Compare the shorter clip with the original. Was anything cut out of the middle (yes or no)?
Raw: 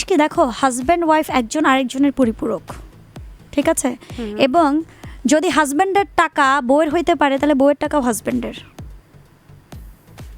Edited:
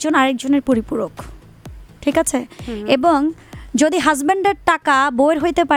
no